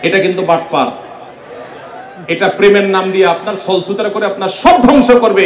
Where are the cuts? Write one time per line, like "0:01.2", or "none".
none